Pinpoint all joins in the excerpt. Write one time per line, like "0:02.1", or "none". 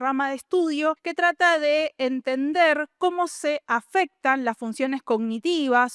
0:01.1